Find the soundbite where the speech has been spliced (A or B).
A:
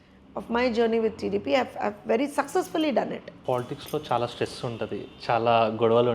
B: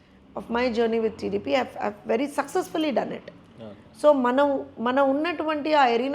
A